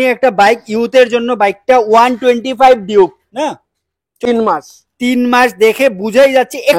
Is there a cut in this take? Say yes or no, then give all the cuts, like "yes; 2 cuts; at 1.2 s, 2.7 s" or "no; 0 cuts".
yes; 1 cut; at 4.2 s